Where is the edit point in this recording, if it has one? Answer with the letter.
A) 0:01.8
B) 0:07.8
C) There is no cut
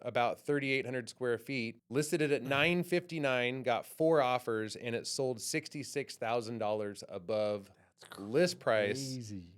A